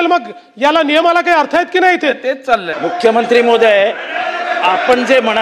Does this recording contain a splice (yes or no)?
yes